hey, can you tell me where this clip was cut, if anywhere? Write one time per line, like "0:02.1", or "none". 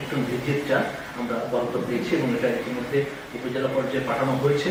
none